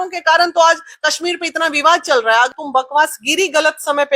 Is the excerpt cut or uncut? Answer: cut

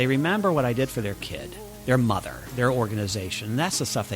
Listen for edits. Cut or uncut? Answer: cut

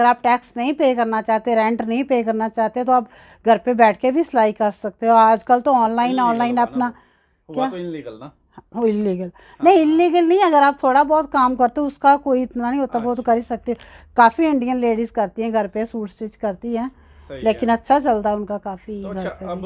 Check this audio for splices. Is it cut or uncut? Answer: uncut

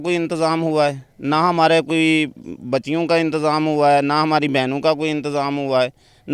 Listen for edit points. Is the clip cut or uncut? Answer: uncut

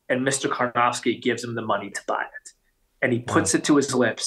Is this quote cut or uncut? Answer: uncut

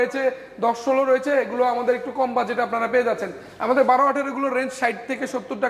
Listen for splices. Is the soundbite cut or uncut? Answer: uncut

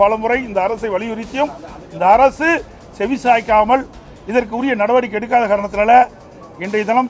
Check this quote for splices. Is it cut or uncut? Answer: uncut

